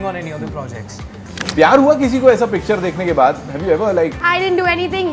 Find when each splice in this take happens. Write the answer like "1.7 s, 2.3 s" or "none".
1.4 s, 4.2 s